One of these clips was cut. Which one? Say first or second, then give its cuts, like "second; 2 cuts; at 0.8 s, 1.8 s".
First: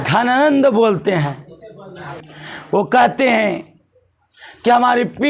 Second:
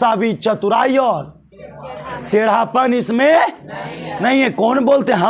first; 1 cut; at 2.2 s